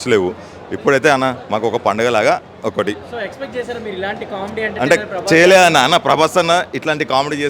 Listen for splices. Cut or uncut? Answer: uncut